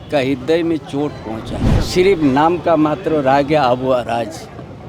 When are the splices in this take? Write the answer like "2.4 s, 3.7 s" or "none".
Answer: 1.7 s